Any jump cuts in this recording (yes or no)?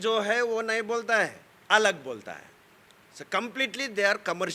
no